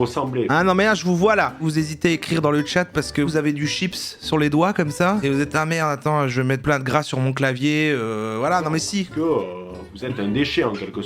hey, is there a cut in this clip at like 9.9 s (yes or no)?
no